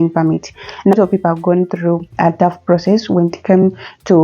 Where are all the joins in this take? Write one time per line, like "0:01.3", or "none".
0:00.9